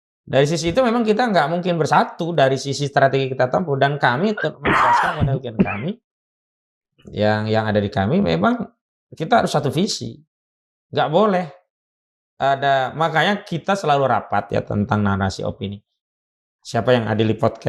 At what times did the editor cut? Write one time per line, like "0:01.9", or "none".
none